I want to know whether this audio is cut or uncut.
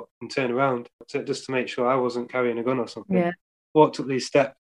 cut